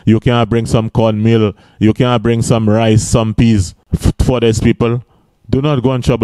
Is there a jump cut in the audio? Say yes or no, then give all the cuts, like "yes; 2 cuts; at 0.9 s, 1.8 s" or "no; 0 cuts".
yes; 1 cut; at 3.8 s